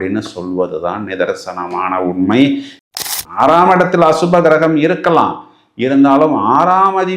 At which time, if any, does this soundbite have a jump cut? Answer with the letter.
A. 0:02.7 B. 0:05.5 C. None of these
A